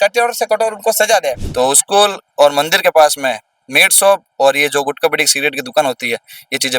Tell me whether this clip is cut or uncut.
cut